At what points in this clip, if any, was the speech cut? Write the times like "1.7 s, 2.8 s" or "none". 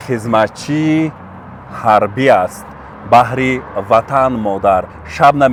none